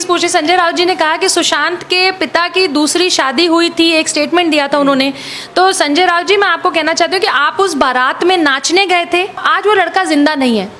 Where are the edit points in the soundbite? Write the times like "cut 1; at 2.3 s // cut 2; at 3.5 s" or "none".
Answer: cut 1; at 9.4 s